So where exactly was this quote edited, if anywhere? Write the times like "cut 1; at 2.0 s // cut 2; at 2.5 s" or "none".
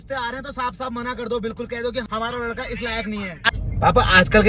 cut 1; at 2.1 s // cut 2; at 3.4 s